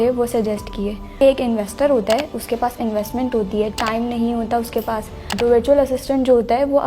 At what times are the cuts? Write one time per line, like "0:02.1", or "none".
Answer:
0:01.2
0:05.3